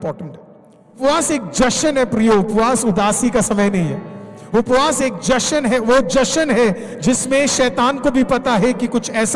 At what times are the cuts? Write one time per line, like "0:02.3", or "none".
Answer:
0:01.0

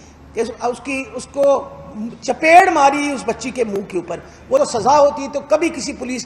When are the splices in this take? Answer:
0:04.6

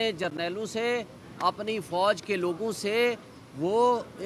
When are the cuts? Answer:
none

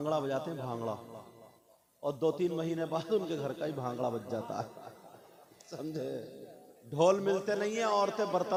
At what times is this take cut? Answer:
none

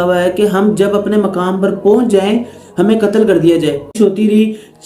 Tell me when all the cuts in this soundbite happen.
0:04.0

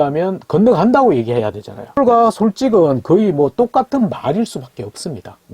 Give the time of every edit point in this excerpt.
0:02.0

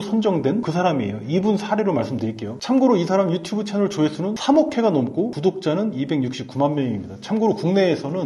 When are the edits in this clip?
none

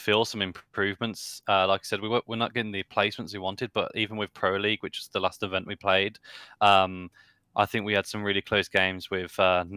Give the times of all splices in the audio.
none

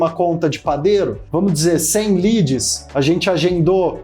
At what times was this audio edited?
0:01.2
0:02.8

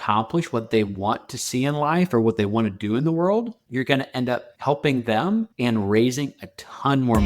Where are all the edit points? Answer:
0:03.6
0:04.5
0:05.5

